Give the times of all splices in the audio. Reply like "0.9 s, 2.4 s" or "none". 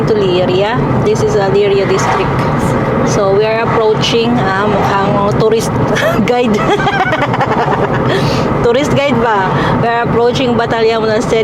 none